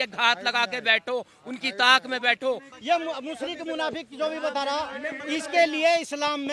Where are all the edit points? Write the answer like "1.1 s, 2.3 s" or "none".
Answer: 2.7 s